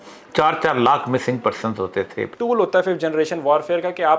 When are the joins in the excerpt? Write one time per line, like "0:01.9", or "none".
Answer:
0:02.3